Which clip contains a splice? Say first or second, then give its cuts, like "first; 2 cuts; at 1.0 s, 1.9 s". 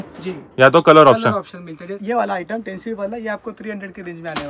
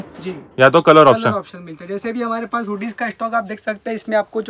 first; 1 cut; at 1.9 s